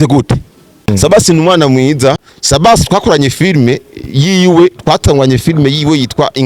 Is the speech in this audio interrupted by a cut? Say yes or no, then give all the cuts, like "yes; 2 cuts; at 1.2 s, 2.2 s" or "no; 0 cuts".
yes; 2 cuts; at 0.9 s, 2.3 s